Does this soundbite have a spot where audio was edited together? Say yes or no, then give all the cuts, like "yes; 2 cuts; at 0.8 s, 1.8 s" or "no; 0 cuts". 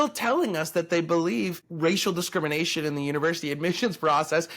yes; 1 cut; at 1.6 s